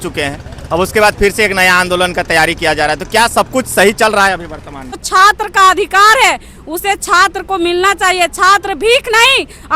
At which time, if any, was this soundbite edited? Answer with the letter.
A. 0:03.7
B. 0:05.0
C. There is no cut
B